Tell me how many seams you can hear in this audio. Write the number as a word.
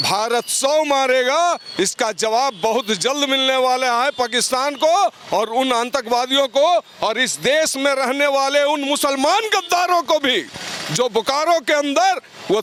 zero